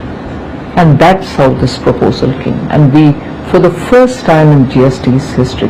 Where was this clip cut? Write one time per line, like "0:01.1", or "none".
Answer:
none